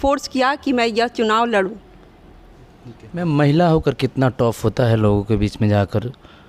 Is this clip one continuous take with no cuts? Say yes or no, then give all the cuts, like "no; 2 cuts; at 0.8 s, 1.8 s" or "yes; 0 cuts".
yes; 0 cuts